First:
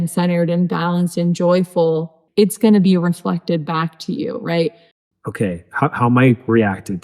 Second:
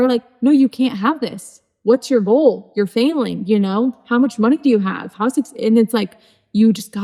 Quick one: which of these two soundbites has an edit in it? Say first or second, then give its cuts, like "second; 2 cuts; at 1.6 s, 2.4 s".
first; 2 cuts; at 2.2 s, 4.9 s